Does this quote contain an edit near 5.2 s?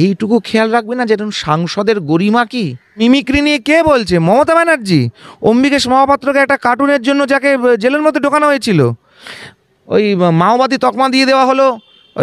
no; 1 cut; at 2.8 s

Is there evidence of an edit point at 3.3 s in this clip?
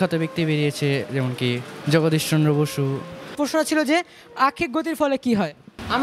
yes; 1 cut; at 3.3 s

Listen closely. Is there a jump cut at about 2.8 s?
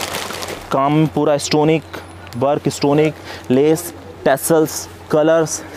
no; 0 cuts

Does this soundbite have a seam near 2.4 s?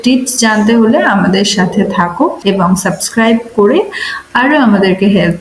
yes; 1 cut; at 2.4 s

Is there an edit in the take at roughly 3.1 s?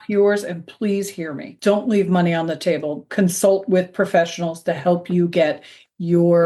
yes; 1 cut; at 3.1 s

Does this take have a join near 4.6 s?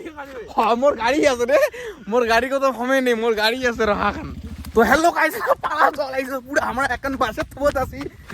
yes; 1 cut; at 4.6 s

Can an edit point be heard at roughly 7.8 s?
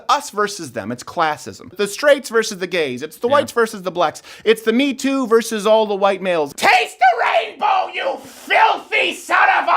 no; 2 cuts; at 1.7 s, 6.5 s

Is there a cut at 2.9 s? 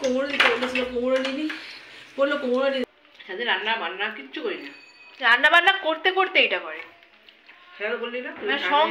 yes; 1 cut; at 2.9 s

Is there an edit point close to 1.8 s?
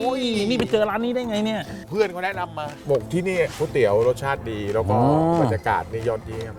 yes; 2 cuts; at 1.8 s, 3.5 s

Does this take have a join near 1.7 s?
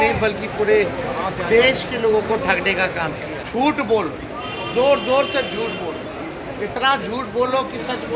no; 1 cut; at 3.4 s

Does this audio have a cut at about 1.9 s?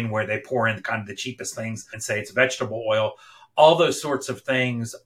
yes; 1 cut; at 1.9 s

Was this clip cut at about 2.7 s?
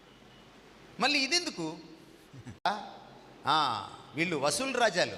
yes; 1 cut; at 2.7 s

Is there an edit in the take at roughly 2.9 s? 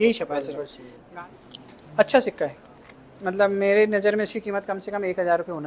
no; 1 cut; at 1.0 s

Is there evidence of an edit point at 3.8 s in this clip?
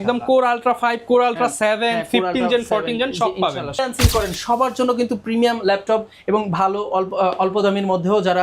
yes; 1 cut; at 3.8 s

